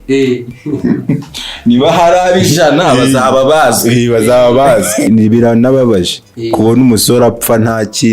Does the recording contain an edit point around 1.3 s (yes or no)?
no